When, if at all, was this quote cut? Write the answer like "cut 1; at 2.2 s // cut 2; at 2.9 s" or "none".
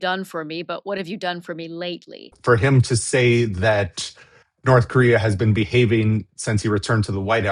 cut 1; at 2.3 s

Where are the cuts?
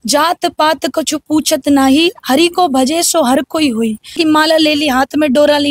cut 1; at 4.2 s

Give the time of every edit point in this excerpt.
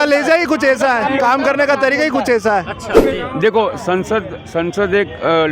cut 1; at 3.0 s

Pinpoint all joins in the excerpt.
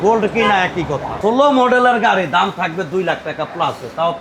cut 1; at 1.1 s

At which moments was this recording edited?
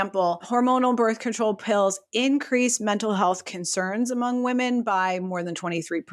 none

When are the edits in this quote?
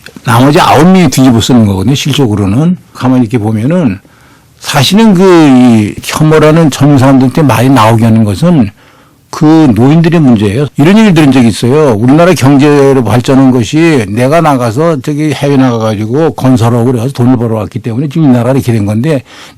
cut 1; at 3.0 s // cut 2; at 6.1 s // cut 3; at 10.6 s

